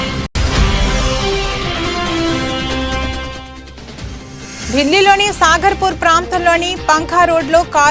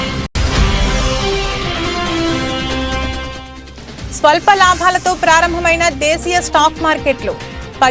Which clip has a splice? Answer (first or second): first